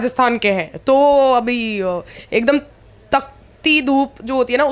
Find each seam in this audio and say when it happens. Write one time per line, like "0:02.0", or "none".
none